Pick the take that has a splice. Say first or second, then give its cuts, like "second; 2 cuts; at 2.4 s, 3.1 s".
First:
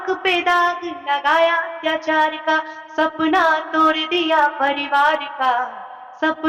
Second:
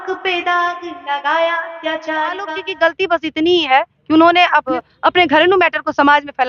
second; 2 cuts; at 2.6 s, 4.8 s